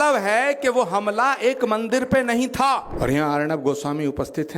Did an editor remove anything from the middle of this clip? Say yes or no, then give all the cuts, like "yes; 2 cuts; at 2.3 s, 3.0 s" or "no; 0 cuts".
yes; 1 cut; at 2.9 s